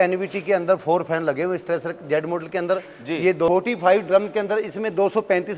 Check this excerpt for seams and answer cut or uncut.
cut